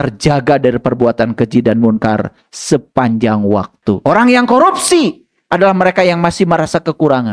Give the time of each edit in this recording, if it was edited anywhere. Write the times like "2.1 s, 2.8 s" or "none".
4.0 s